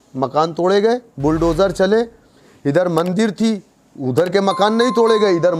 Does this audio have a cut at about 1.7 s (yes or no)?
no